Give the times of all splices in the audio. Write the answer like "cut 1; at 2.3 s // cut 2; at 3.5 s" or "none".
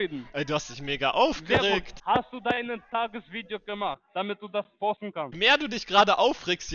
cut 1; at 1.9 s // cut 2; at 5.3 s